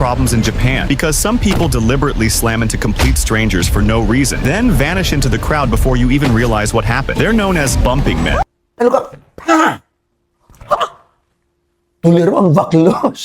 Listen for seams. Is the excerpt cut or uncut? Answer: cut